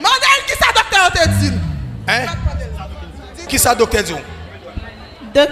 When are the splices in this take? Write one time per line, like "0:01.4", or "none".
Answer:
0:03.5